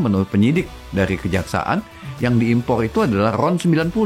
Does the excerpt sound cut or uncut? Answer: uncut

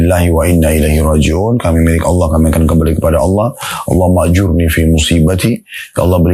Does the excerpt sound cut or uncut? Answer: uncut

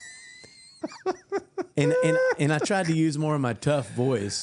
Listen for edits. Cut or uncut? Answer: uncut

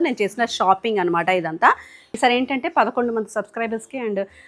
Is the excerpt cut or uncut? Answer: cut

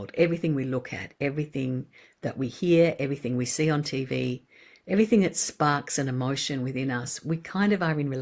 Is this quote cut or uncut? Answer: uncut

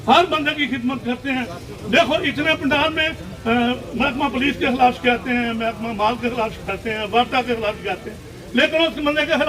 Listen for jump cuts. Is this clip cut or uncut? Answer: uncut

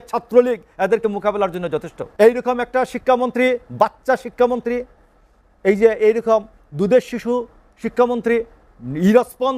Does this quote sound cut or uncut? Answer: cut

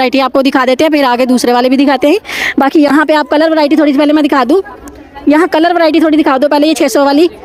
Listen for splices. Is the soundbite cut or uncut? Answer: uncut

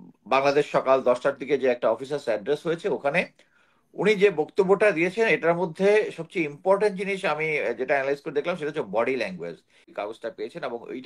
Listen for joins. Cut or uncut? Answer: cut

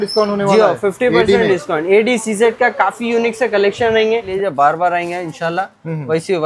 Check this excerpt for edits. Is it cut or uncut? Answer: cut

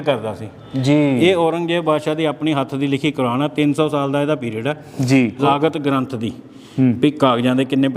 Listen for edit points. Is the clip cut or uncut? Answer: cut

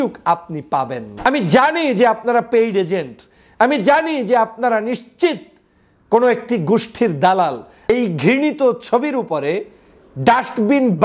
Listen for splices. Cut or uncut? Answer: cut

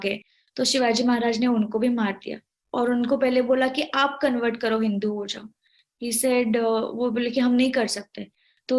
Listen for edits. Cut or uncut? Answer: uncut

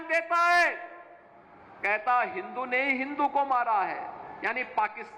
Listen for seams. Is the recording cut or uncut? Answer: uncut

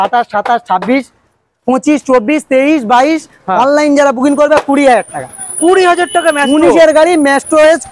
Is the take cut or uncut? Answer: uncut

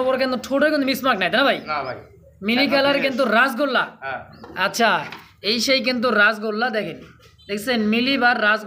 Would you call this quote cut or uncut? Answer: uncut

